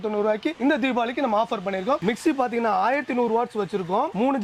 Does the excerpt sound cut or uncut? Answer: cut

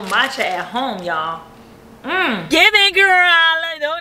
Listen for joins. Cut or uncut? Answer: cut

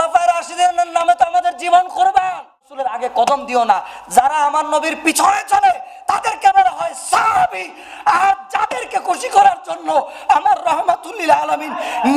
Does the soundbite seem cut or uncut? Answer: cut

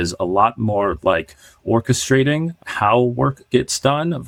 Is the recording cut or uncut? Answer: uncut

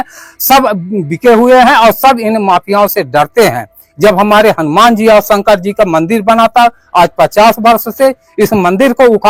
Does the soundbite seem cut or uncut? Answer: uncut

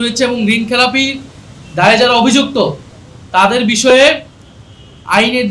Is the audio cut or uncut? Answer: uncut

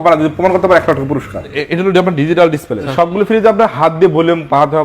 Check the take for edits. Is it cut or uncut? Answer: cut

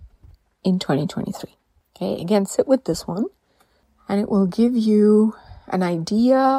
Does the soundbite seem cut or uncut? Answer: uncut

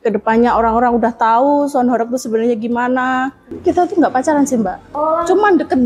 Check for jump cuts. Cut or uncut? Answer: cut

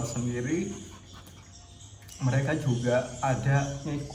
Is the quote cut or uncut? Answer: uncut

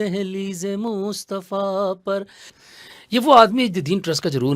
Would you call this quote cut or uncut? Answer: cut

